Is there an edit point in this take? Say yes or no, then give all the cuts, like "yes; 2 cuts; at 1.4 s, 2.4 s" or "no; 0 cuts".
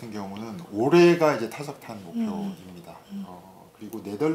no; 0 cuts